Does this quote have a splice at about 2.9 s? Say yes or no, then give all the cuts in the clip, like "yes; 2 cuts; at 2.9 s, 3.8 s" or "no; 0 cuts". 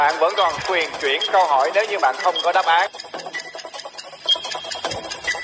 yes; 1 cut; at 2.9 s